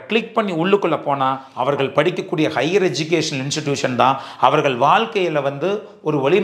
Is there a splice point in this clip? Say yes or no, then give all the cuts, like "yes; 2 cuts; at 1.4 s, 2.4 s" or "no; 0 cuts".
yes; 1 cut; at 1.5 s